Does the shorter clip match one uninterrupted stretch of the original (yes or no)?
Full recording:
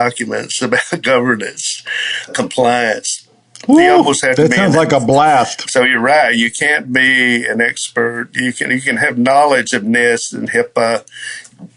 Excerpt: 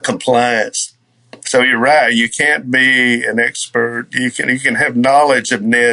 no